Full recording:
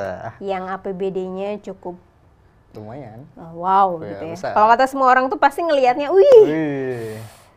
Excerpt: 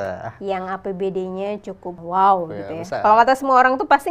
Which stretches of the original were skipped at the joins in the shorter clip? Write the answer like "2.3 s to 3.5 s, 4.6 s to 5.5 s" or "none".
2.0 s to 3.5 s